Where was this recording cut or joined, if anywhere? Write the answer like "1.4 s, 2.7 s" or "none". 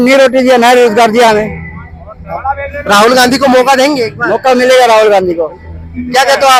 none